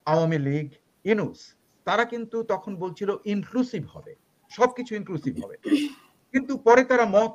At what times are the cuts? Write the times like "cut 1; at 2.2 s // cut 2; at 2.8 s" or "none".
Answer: none